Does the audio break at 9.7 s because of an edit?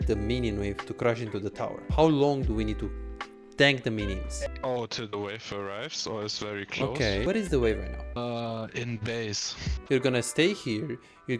yes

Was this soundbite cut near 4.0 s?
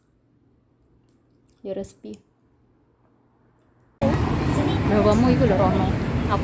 yes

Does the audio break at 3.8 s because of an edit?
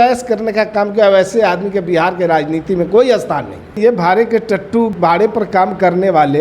yes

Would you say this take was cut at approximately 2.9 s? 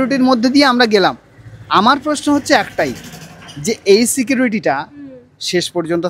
no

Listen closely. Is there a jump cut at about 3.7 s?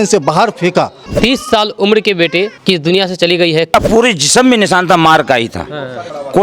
yes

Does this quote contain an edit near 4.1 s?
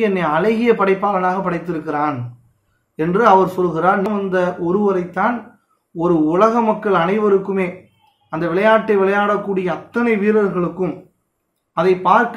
yes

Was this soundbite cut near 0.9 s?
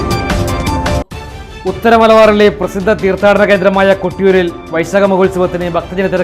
yes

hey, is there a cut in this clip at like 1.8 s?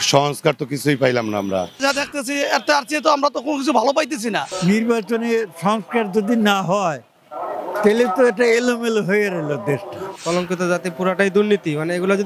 yes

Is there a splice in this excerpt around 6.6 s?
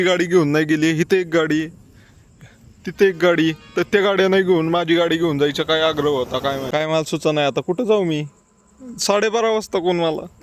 yes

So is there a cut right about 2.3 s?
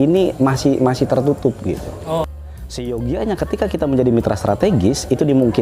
yes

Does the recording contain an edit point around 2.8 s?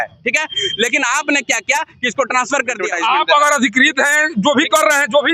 yes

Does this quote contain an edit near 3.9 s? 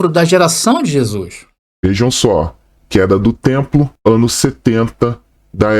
no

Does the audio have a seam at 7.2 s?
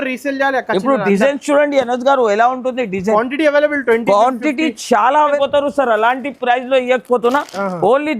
no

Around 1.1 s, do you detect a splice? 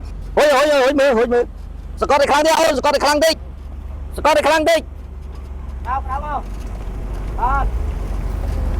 no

